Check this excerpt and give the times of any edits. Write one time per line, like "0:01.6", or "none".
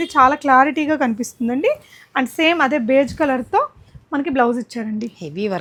none